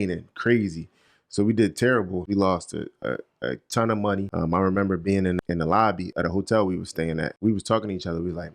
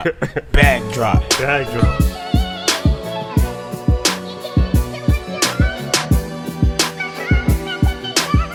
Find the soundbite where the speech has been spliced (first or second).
first